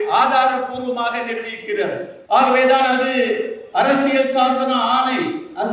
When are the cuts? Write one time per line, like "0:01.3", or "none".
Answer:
0:02.1